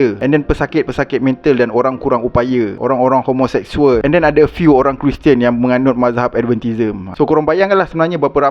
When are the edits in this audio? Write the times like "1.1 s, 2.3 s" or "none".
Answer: 4.0 s

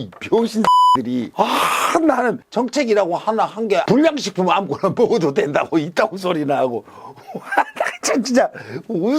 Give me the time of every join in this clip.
2.4 s, 3.8 s

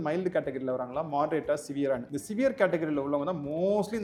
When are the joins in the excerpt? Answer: none

